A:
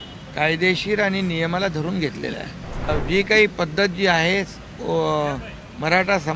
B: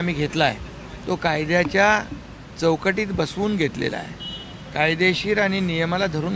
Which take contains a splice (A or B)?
A